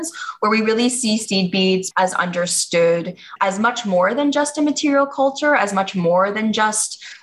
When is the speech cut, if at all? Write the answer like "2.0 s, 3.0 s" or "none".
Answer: 1.9 s